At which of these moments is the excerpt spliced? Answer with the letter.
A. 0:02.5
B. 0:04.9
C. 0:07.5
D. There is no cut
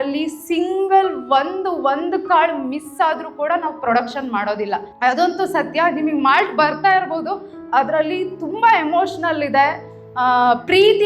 B